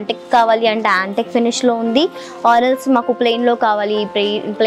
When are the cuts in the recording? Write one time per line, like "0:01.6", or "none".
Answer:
none